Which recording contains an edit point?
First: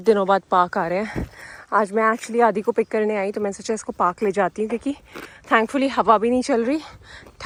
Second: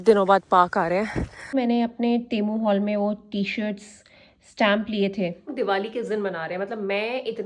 second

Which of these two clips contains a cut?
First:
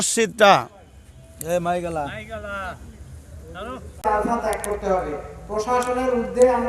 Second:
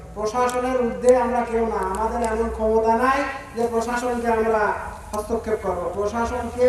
first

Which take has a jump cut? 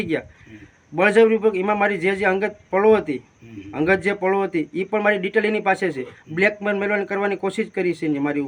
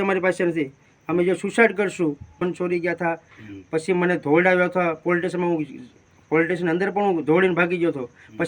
second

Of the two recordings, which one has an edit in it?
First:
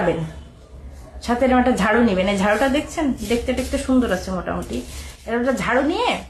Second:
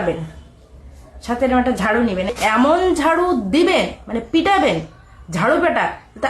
second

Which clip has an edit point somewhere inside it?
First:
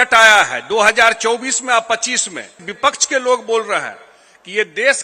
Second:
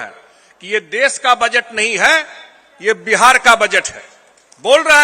first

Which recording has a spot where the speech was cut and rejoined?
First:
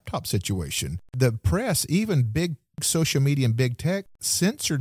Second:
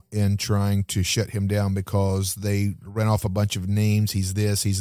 first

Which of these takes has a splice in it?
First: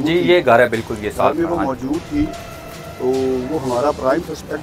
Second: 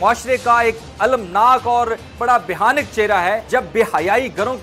second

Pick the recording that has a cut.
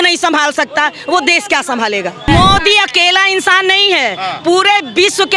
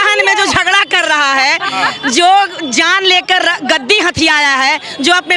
first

